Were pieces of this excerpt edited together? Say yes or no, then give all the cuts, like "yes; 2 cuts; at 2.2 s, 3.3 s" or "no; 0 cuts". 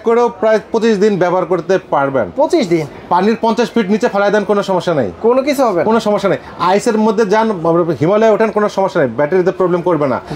no; 0 cuts